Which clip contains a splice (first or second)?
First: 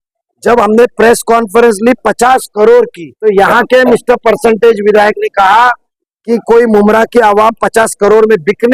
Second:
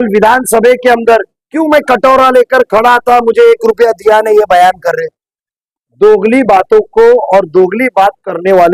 first